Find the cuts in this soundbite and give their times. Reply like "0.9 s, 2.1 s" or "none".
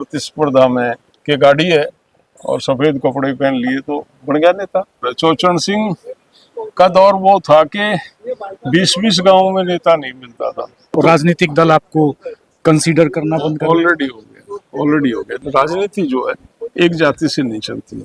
1.1 s, 5.0 s, 10.9 s, 15.4 s